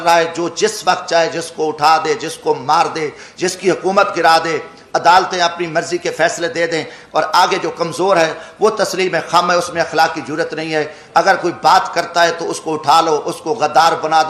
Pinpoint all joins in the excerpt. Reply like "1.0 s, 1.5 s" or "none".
none